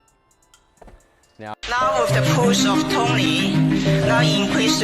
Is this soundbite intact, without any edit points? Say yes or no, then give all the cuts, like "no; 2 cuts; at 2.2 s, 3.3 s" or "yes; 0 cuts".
no; 1 cut; at 1.5 s